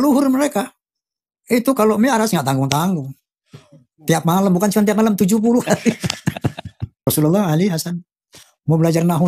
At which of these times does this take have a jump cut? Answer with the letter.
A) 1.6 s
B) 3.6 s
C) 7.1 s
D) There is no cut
C